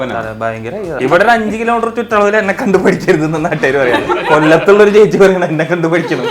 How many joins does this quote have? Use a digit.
1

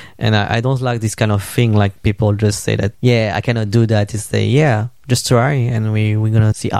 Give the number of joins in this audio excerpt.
1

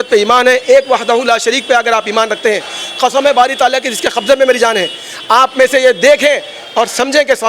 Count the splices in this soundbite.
0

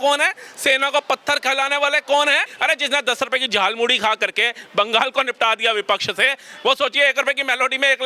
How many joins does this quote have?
1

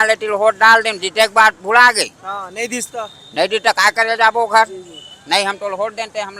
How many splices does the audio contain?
0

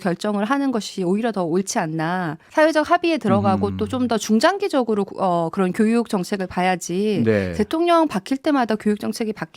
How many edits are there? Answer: 1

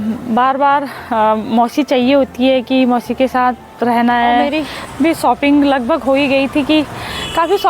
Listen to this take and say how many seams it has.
1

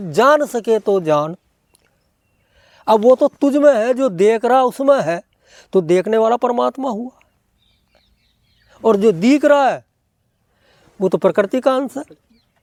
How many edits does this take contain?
0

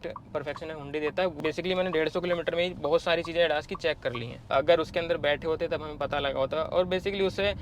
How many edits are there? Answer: 2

